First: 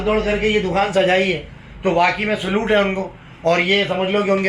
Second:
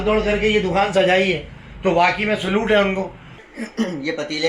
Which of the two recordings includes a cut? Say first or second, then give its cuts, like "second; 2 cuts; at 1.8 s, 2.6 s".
second; 1 cut; at 3.3 s